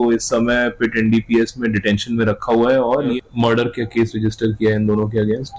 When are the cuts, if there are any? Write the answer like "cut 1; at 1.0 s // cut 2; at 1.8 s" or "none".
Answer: cut 1; at 3.2 s

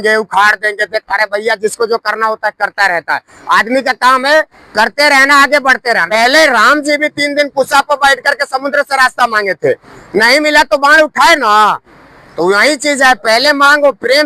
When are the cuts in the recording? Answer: cut 1; at 6.1 s

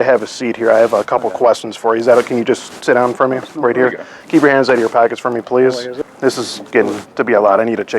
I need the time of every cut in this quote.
cut 1; at 5.9 s

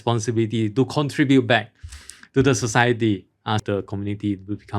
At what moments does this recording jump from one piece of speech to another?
cut 1; at 3.6 s

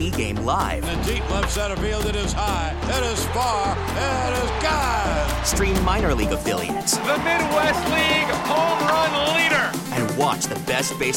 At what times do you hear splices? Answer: none

